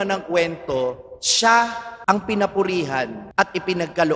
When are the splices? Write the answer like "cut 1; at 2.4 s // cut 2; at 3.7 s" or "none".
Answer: cut 1; at 1.9 s // cut 2; at 3.2 s